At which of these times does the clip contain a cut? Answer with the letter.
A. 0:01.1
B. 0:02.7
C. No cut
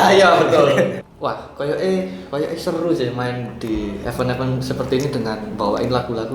A